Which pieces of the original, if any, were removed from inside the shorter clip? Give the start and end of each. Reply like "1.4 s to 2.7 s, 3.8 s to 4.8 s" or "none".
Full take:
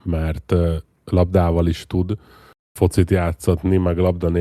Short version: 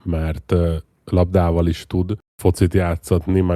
2.2 s to 2.6 s